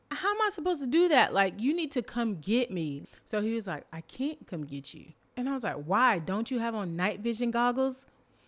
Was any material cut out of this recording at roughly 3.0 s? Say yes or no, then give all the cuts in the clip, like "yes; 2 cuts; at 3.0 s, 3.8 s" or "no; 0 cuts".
yes; 1 cut; at 3.0 s